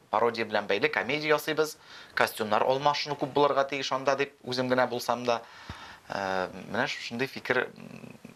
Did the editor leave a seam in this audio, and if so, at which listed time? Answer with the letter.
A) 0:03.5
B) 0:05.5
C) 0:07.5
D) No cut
D